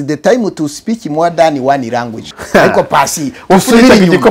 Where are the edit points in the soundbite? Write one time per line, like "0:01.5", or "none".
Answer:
0:02.2